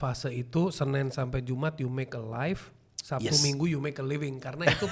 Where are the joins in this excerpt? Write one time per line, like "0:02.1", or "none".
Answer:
none